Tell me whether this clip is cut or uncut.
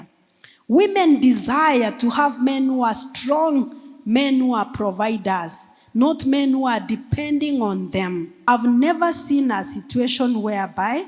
cut